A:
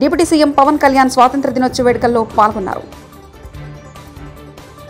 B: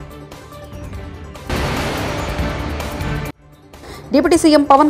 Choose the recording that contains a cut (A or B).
B